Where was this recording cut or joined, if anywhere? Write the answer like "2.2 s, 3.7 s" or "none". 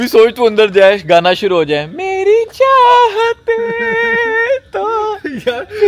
none

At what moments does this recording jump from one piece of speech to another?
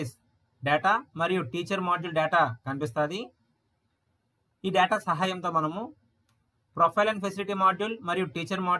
none

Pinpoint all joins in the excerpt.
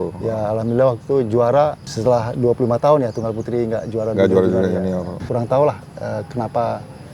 5.2 s

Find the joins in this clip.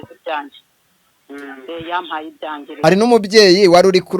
2.7 s

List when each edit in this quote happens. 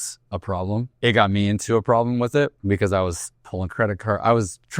0.9 s, 2.6 s

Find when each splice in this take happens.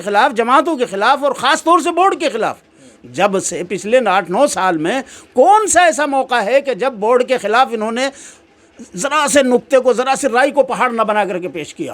none

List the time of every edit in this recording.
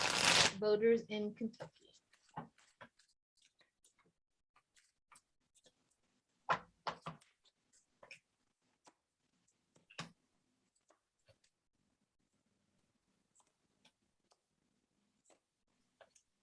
none

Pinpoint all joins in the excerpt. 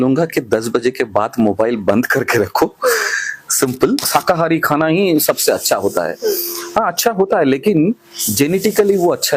4.1 s

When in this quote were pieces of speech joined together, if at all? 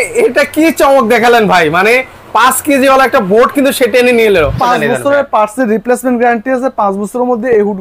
4.6 s

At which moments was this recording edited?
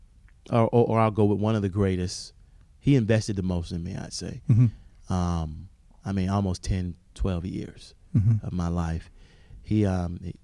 none

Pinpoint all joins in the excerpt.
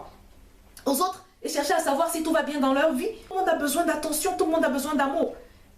3.3 s

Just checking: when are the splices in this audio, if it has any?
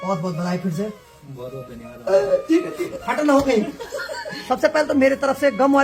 3.0 s, 4.4 s

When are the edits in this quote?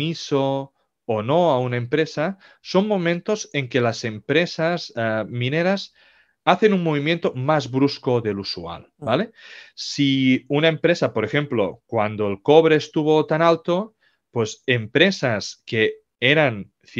none

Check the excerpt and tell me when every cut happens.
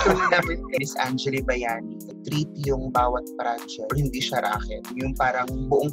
0.8 s, 2.1 s, 3.9 s, 4.9 s

